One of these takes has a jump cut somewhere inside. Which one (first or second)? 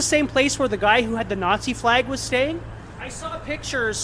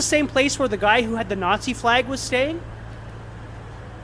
first